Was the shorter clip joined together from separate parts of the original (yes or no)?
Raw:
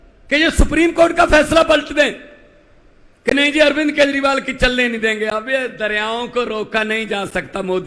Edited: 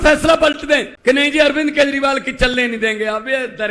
yes